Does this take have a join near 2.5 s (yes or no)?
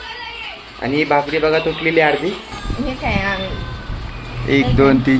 yes